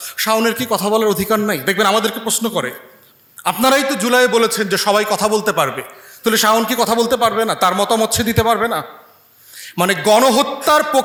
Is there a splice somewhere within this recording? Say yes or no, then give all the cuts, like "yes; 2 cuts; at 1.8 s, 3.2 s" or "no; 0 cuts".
no; 0 cuts